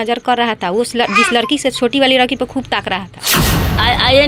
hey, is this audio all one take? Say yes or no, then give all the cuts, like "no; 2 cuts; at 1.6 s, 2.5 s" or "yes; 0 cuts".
no; 1 cut; at 3.3 s